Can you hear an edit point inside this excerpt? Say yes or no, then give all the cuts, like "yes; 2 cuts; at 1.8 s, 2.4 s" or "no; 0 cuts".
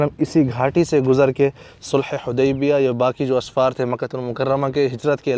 no; 0 cuts